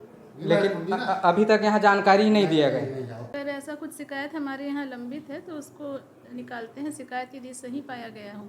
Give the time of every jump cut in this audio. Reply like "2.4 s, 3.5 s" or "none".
3.3 s

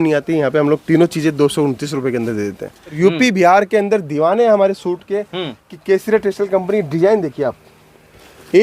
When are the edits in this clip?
3.0 s

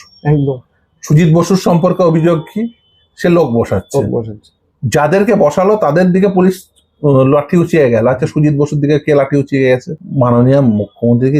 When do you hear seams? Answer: 9.9 s

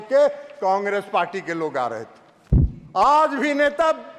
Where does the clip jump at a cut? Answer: none

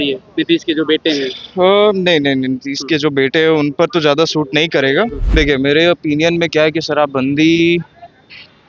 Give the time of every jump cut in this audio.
5.2 s

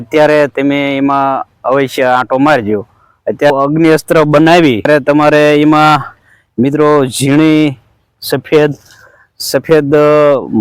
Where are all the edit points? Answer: 3.5 s, 4.9 s

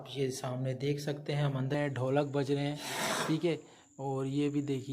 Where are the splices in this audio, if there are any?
1.8 s

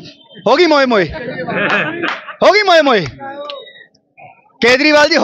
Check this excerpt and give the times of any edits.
none

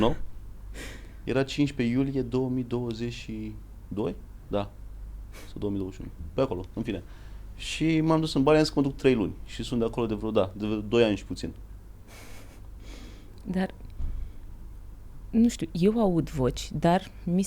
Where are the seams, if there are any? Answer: none

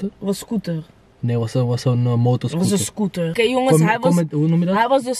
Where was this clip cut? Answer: 3.3 s

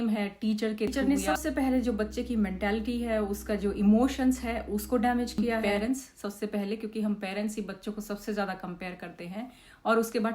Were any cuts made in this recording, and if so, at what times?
0.9 s, 5.6 s

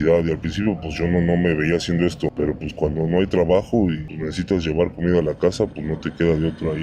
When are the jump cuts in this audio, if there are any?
none

